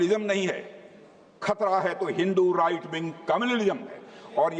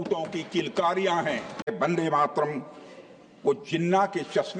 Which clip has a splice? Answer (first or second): second